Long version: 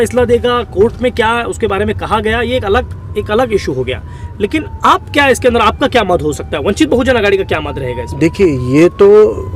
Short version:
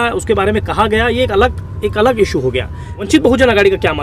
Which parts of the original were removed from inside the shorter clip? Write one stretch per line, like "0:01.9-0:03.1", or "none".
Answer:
0:04.3-0:06.7